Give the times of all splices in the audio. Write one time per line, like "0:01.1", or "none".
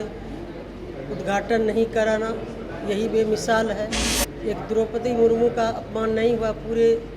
0:04.0